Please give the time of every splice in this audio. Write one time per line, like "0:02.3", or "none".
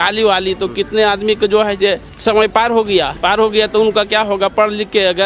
0:02.1
0:03.1